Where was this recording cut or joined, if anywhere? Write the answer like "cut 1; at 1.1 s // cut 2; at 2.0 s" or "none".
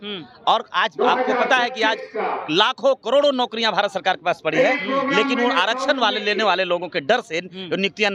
none